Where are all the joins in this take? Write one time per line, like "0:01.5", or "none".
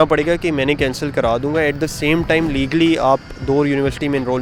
none